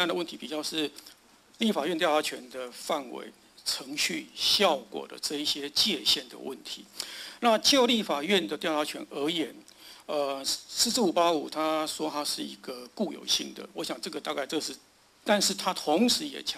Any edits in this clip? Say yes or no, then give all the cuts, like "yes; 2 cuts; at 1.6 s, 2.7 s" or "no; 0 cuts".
no; 0 cuts